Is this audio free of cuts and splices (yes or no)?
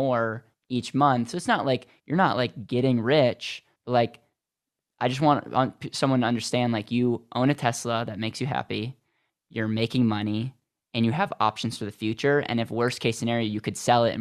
yes